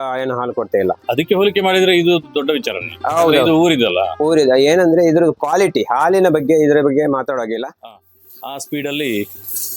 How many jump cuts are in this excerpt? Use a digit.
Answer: 1